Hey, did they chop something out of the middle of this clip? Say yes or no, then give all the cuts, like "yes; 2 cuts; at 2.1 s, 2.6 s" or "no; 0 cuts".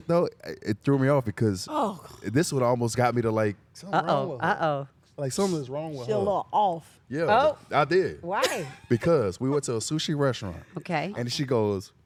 no; 0 cuts